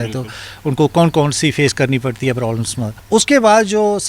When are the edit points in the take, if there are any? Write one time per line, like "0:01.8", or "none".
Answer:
0:02.9

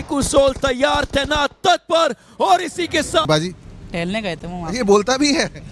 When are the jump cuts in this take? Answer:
0:03.2

